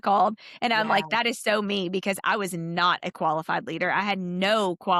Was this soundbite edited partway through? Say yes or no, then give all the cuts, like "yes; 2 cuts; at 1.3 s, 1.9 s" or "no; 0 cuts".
no; 0 cuts